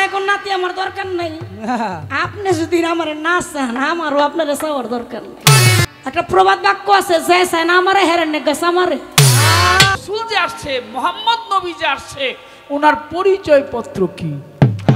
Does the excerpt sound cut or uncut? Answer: cut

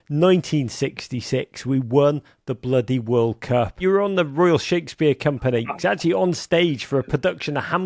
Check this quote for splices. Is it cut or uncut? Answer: cut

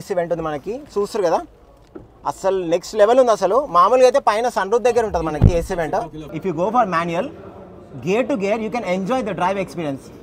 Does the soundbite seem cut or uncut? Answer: cut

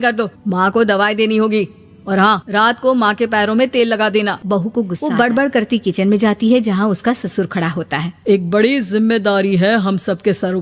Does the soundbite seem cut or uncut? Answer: cut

